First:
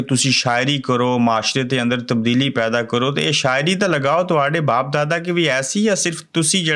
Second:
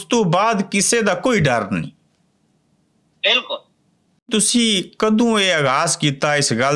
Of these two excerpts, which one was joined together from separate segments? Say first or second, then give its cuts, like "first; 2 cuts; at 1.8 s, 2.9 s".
second; 1 cut; at 4.3 s